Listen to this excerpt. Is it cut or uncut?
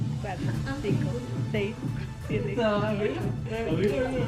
uncut